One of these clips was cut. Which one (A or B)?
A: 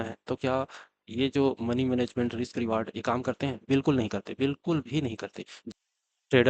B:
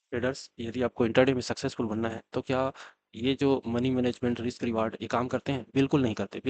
A